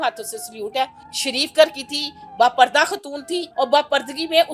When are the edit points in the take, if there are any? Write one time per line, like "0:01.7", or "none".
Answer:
0:01.0
0:03.4